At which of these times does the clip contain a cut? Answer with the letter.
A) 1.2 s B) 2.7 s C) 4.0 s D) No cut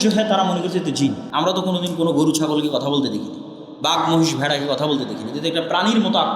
A